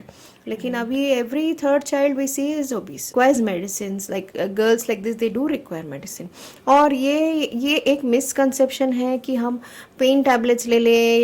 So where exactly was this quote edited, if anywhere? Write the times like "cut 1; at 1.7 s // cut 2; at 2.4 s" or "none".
cut 1; at 3.1 s